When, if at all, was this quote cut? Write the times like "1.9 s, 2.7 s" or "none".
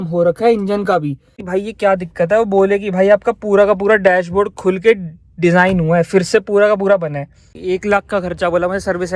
1.4 s, 7.6 s